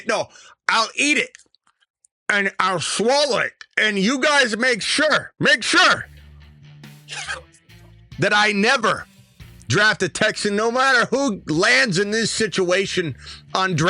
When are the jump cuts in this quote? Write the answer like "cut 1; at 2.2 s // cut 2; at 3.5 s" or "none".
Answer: none